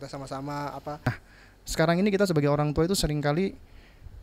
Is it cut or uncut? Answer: cut